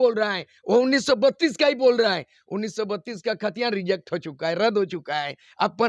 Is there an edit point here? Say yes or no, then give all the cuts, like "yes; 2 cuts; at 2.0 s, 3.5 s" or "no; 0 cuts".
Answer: no; 0 cuts